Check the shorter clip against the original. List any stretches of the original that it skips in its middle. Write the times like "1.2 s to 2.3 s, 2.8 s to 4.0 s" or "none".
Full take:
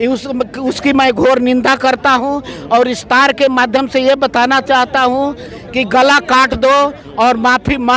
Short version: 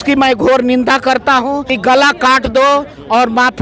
2.5 s to 5.8 s